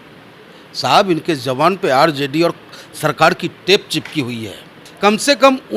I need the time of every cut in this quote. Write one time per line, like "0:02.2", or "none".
0:04.8